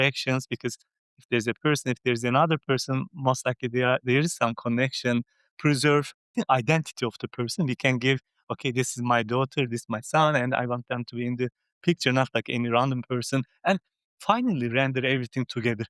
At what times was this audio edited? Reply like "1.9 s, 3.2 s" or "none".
6.2 s